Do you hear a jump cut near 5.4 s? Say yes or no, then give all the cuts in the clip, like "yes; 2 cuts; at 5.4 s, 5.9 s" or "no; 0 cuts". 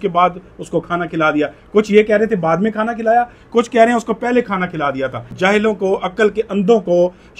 yes; 1 cut; at 5.4 s